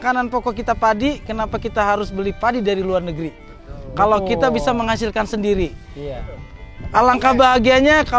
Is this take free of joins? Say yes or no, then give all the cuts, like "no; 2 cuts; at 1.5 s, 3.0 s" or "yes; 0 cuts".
yes; 0 cuts